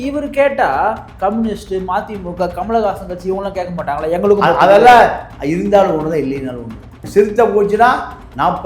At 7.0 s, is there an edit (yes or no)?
yes